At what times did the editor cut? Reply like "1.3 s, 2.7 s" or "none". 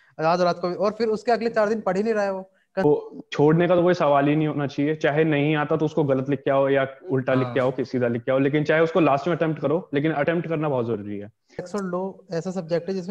2.8 s, 11.7 s